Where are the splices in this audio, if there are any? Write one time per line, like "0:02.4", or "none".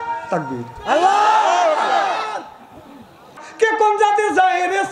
0:03.4